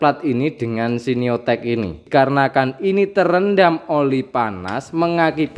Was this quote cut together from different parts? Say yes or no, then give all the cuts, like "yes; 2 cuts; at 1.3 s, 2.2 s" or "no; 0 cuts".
yes; 1 cut; at 2.0 s